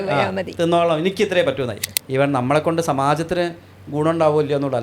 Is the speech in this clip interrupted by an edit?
yes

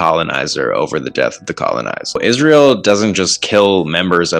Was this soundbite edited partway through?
yes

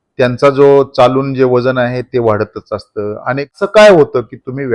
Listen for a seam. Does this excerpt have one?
yes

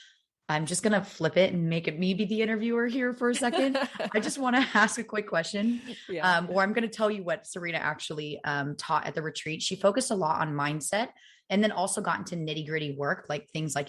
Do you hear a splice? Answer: no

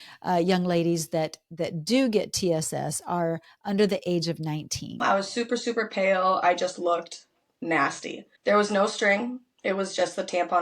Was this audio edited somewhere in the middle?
yes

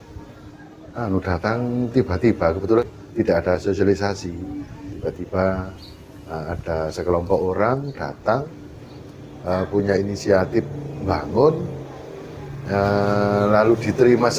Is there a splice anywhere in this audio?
yes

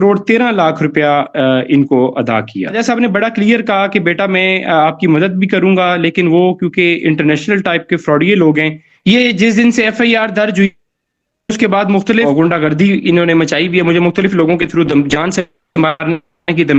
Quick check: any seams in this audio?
yes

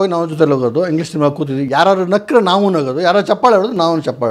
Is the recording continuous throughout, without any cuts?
yes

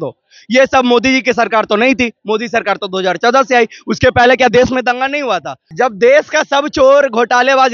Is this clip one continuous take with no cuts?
no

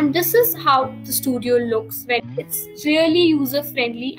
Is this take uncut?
no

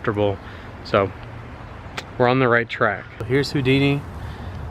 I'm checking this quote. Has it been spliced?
yes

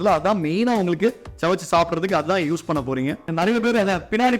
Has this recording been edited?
yes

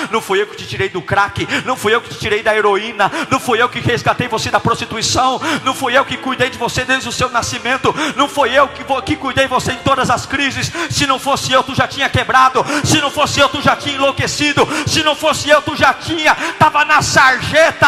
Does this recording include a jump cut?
no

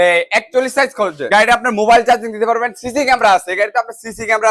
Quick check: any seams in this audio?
yes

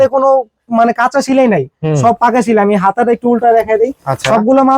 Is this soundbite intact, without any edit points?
yes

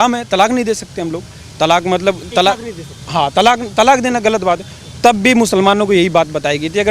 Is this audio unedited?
yes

